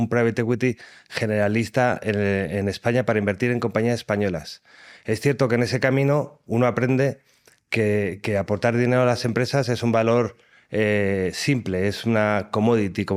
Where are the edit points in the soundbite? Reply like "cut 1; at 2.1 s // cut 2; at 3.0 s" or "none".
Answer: none